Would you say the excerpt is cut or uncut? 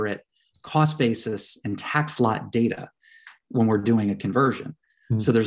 uncut